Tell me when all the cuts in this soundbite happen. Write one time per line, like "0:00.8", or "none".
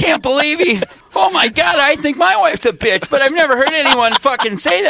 0:01.0